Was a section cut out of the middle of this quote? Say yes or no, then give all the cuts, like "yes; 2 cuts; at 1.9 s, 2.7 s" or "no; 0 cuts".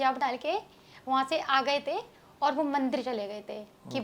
no; 0 cuts